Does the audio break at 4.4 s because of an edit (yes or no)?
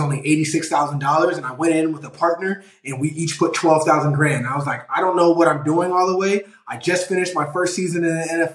no